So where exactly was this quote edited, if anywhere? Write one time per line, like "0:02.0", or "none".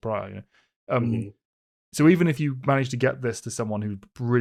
none